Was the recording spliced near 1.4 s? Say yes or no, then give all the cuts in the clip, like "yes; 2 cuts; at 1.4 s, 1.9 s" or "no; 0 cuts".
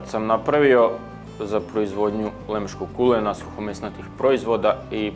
no; 0 cuts